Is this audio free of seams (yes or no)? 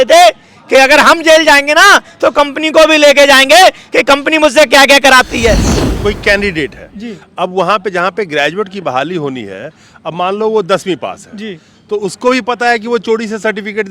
no